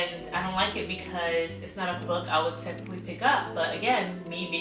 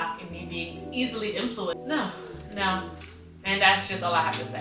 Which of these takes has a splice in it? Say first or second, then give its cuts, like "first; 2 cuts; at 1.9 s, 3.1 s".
second; 1 cut; at 1.7 s